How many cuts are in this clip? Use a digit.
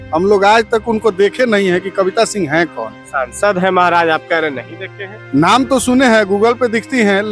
0